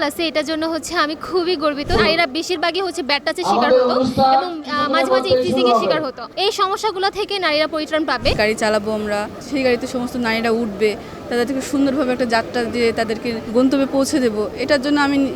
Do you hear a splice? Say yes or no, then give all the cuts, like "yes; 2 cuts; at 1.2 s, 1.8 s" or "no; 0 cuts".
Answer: yes; 5 cuts; at 2.0 s, 6.2 s, 8.3 s, 9.4 s, 13.4 s